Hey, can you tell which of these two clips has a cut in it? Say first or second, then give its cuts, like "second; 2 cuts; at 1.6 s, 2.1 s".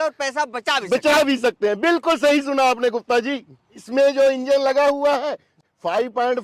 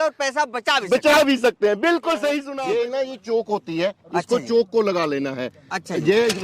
second; 1 cut; at 2.5 s